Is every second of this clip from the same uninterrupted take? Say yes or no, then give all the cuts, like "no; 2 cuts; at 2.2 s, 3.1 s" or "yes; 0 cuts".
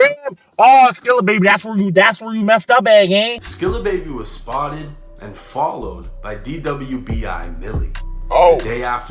no; 1 cut; at 3.4 s